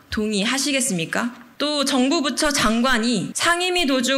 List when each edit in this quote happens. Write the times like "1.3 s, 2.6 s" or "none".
1.4 s, 3.3 s